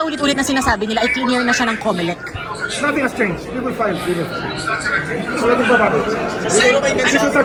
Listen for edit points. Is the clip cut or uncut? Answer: uncut